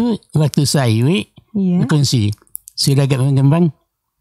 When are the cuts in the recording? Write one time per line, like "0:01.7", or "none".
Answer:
none